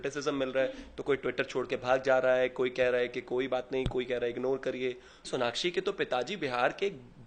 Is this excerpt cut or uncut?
cut